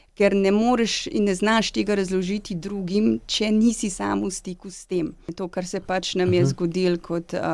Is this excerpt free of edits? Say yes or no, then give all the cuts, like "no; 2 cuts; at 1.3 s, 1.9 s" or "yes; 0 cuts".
no; 1 cut; at 5.4 s